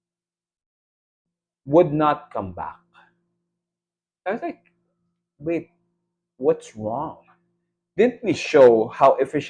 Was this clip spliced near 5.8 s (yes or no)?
no